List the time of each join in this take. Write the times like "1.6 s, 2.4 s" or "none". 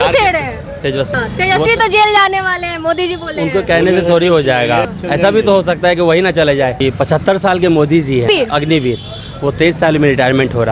1.1 s, 4.9 s, 6.8 s, 8.3 s